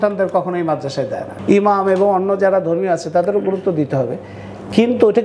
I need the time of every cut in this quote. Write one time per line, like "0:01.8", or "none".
0:01.3